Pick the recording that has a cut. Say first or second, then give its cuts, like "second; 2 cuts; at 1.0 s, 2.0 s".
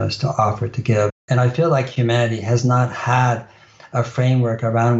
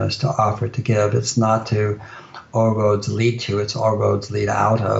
first; 1 cut; at 1.2 s